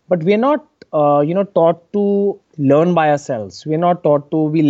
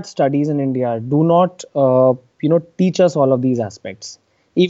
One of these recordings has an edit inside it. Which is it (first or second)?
first